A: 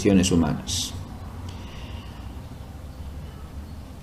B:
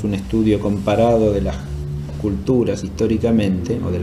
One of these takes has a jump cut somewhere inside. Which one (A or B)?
A